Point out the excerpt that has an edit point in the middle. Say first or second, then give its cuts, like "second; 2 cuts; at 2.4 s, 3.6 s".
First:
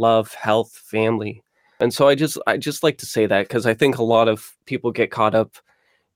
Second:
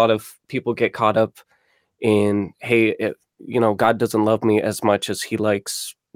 first; 1 cut; at 1.8 s